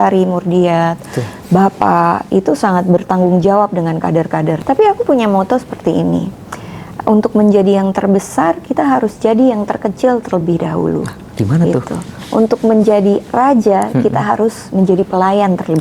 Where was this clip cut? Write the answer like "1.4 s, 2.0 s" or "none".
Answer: 4.6 s